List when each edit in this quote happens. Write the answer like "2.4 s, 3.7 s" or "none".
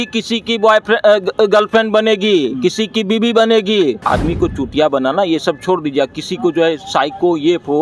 4.0 s